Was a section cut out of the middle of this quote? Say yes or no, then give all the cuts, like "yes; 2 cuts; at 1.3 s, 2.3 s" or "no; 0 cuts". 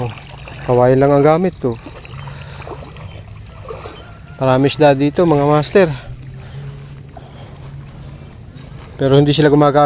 no; 0 cuts